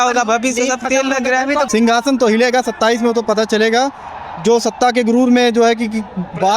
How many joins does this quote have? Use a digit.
1